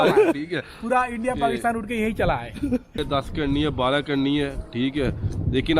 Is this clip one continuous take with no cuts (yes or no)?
no